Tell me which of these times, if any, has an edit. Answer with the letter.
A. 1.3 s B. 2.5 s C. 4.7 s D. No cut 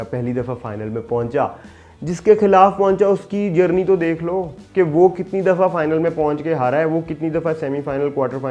D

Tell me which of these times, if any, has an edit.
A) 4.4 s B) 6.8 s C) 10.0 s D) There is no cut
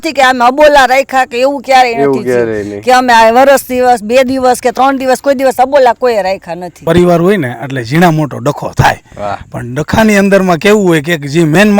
B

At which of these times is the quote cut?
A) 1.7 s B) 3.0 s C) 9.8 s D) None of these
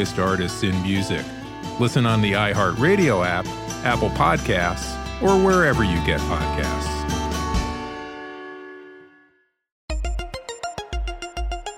C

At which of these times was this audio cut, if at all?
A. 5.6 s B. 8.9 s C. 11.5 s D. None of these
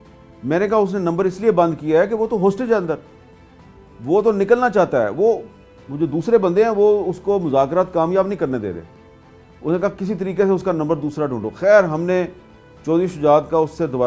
D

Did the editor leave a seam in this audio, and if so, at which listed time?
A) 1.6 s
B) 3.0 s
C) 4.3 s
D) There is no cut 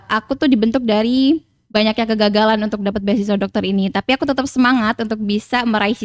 D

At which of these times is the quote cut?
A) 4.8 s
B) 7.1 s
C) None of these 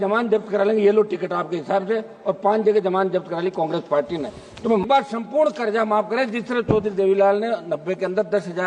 A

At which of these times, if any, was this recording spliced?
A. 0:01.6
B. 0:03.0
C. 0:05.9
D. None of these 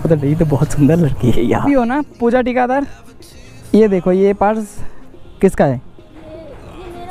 A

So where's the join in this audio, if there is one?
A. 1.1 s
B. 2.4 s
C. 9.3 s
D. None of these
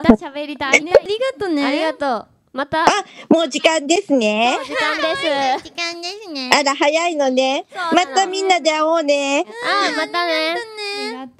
A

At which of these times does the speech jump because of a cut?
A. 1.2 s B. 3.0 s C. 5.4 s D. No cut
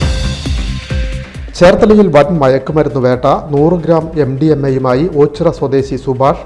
A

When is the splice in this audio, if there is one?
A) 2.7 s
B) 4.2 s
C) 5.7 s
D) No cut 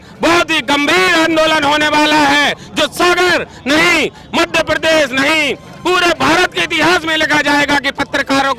D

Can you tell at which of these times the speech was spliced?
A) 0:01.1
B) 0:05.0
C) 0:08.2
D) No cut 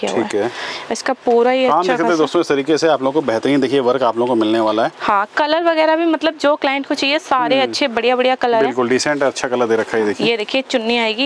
D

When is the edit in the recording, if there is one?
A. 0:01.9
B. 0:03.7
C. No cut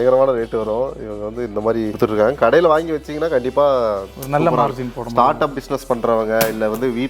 A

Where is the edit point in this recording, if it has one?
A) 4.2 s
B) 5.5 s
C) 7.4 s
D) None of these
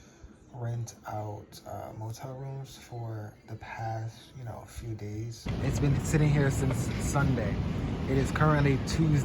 B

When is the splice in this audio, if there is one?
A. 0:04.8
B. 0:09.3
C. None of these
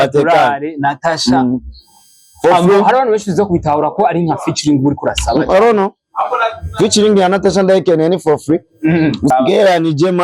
B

